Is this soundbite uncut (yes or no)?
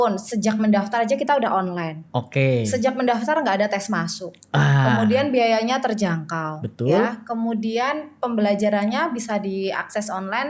yes